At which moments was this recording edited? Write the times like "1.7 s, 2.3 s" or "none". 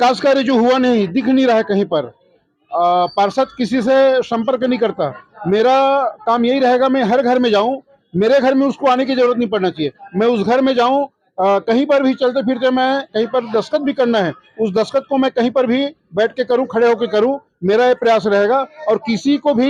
none